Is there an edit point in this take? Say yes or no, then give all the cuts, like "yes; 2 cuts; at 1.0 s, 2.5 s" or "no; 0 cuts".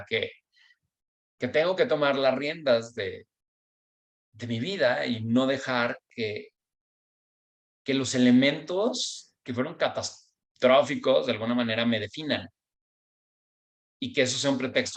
no; 0 cuts